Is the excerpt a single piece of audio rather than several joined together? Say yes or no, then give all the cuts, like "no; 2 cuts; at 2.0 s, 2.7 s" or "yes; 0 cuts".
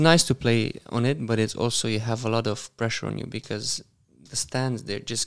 yes; 0 cuts